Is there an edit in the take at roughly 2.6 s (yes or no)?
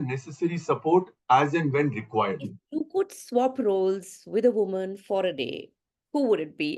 yes